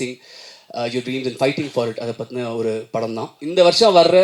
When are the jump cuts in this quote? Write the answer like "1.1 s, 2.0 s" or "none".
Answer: 3.3 s